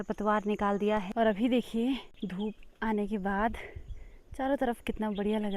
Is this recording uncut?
no; 2 cuts; at 1.1 s, 2.1 s

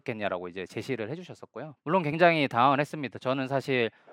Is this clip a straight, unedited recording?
no; 1 cut; at 1.7 s

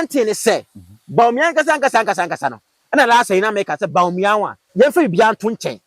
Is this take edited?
yes; 1 cut; at 4.6 s

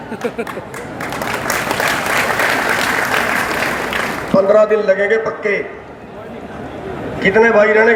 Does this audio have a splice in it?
no; 0 cuts

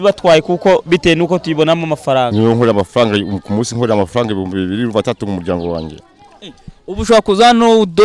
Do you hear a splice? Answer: yes; 1 cut; at 2.3 s

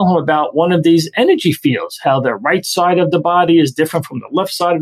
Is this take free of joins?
yes; 0 cuts

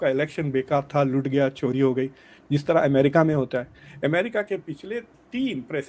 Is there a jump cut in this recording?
no; 0 cuts

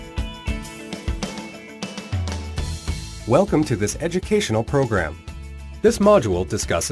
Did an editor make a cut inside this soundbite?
no; 0 cuts

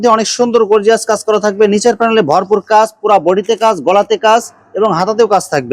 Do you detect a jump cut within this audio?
no; 0 cuts

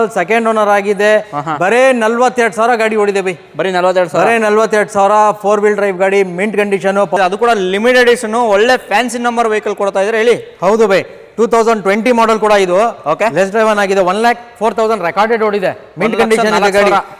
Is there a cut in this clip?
yes; 1 cut; at 7.2 s

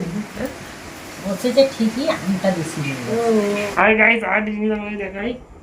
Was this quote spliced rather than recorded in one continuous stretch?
yes; 1 cut; at 3.7 s

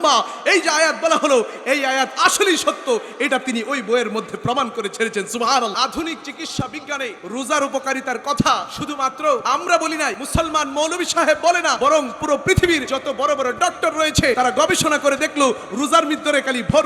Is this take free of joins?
no; 7 cuts; at 5.7 s, 7.2 s, 9.2 s, 10.2 s, 11.8 s, 12.9 s, 14.4 s

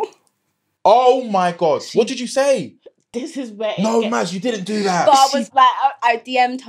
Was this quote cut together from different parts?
no; 0 cuts

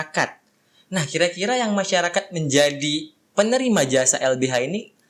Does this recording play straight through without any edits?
yes; 0 cuts

